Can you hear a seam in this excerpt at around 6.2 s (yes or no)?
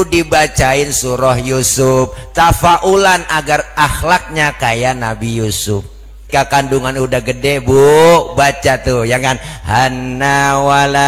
yes